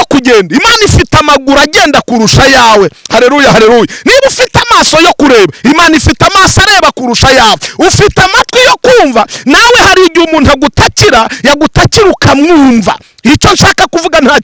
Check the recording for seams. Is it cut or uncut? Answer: uncut